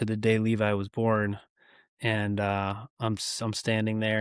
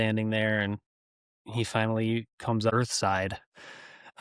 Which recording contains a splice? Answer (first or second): second